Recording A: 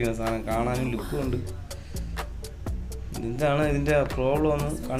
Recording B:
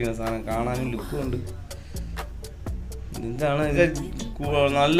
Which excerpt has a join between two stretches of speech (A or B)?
B